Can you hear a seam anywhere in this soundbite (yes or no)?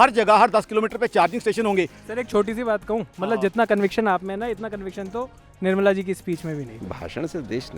yes